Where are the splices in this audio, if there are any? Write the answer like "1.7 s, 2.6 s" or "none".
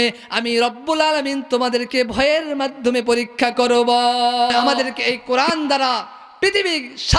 4.7 s